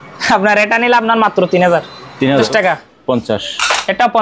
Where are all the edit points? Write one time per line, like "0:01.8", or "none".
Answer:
0:02.5

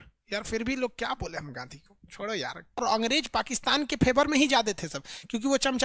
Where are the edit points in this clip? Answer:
0:02.8

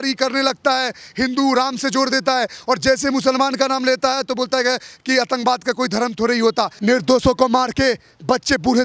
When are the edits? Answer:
0:06.7

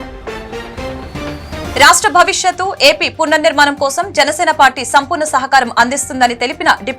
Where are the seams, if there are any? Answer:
0:01.6

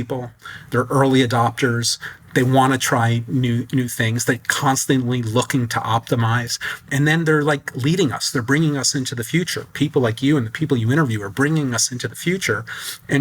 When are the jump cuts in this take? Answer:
0:02.1
0:06.8

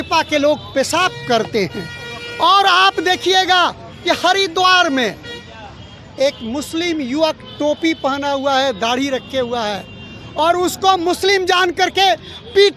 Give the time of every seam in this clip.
none

